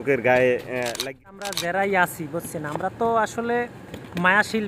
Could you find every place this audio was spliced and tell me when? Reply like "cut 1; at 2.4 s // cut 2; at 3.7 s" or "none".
cut 1; at 1.0 s